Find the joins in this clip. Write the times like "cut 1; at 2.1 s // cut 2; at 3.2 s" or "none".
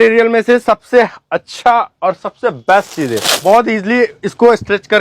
cut 1; at 3.3 s